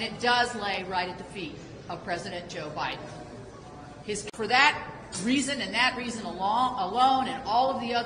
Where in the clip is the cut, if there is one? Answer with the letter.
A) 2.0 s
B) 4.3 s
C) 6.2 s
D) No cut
D